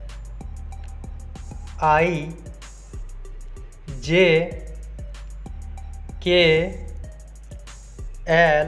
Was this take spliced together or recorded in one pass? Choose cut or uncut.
cut